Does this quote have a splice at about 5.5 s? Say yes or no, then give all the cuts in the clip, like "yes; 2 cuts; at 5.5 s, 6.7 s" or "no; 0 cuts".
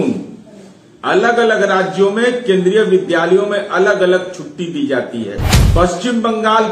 yes; 1 cut; at 5.5 s